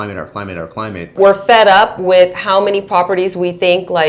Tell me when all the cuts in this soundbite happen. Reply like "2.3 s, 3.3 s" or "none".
1.1 s

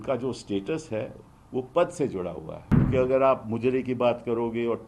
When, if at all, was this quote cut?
2.9 s

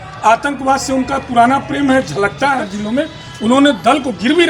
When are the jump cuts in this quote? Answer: 2.7 s

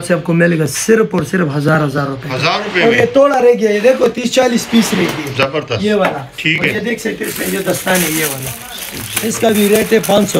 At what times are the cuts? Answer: none

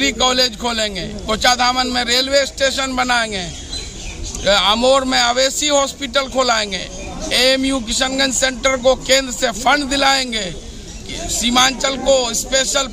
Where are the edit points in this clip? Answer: none

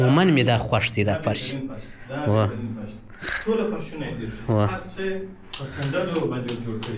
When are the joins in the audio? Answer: none

